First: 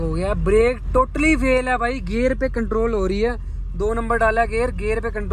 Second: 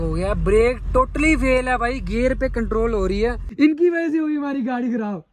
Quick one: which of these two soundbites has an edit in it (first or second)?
second